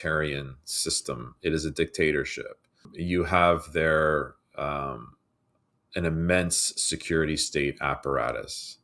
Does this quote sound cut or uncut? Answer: cut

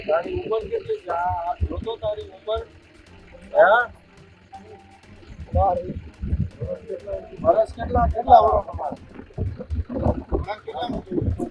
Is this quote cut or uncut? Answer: uncut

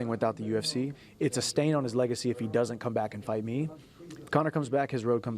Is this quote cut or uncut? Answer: cut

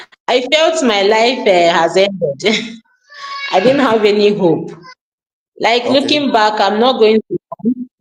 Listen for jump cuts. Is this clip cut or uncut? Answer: uncut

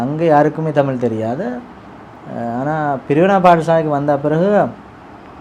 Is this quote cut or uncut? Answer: uncut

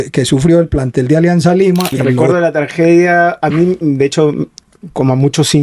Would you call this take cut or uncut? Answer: cut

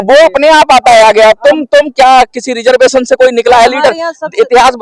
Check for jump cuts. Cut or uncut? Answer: uncut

